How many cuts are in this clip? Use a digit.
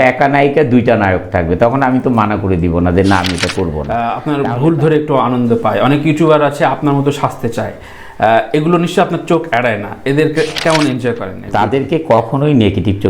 2